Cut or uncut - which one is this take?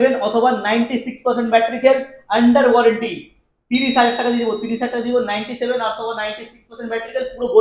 uncut